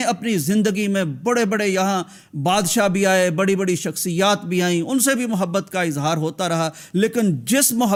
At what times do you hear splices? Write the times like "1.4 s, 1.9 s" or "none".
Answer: none